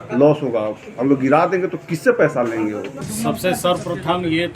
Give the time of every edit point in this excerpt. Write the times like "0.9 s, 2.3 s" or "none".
3.0 s